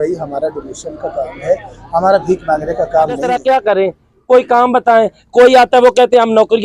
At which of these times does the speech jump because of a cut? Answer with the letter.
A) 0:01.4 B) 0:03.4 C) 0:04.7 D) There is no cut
B